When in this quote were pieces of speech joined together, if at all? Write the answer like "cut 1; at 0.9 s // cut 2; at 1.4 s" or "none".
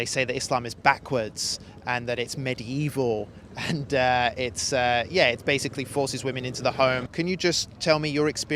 cut 1; at 7.1 s